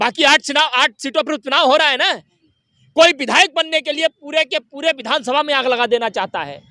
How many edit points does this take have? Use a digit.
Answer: 1